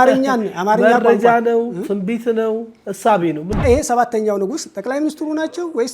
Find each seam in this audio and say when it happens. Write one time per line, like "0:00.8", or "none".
0:03.6